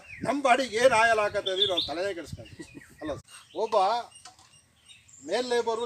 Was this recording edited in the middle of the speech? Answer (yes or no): yes